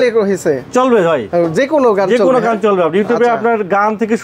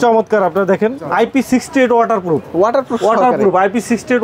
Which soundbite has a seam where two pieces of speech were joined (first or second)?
second